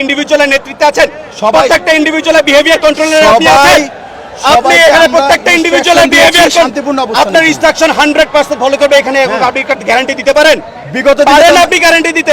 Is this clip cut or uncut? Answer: uncut